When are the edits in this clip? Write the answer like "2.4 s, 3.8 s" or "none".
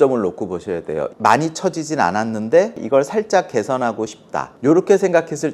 1.1 s, 2.8 s, 4.1 s